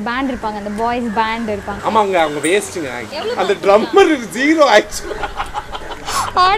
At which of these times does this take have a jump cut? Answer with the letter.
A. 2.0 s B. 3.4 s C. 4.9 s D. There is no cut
B